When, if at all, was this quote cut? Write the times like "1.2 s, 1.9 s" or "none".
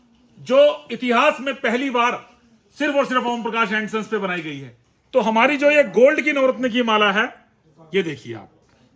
none